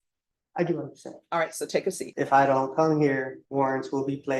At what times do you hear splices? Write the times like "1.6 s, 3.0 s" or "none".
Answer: 2.1 s, 3.4 s